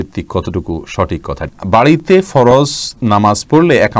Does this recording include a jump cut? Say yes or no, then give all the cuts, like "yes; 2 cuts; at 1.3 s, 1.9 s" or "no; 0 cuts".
yes; 1 cut; at 1.5 s